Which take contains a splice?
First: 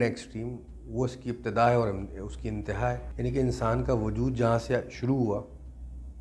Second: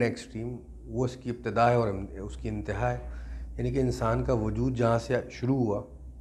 first; 1 cut; at 3.1 s

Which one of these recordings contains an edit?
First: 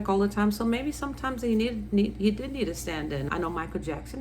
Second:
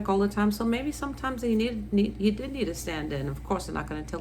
first; 1 cut; at 3.3 s

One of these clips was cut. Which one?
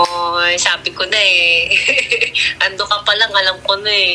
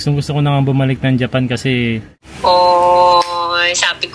second; 1 cut; at 2.1 s

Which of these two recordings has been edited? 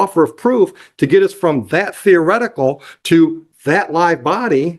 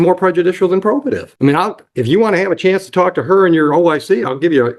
second; 1 cut; at 1.3 s

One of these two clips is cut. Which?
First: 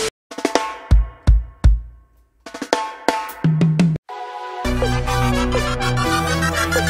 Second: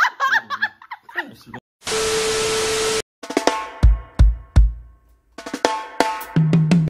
second; 1 cut; at 1.8 s

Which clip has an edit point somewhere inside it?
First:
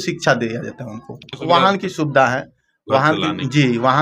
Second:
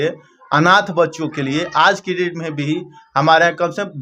first; 1 cut; at 1.4 s

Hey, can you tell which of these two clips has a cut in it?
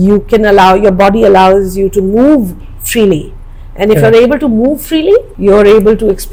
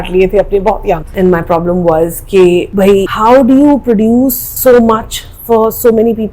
second; 1 cut; at 1.1 s

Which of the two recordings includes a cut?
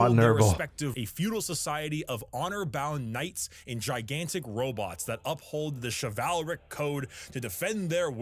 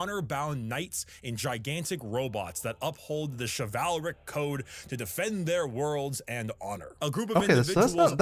first; 1 cut; at 0.9 s

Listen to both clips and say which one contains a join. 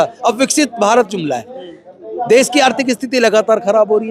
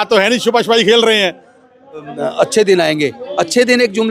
second; 1 cut; at 2.1 s

